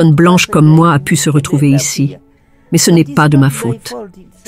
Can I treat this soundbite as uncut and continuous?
yes; 0 cuts

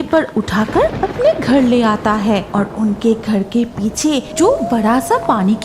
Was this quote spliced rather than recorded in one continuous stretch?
yes; 3 cuts; at 1.0 s, 2.5 s, 4.3 s

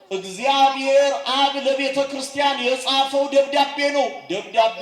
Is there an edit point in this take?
no; 0 cuts

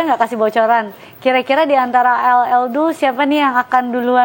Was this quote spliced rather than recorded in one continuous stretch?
no; 0 cuts

